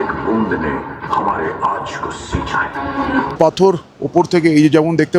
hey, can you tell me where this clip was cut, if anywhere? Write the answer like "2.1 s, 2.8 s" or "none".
3.3 s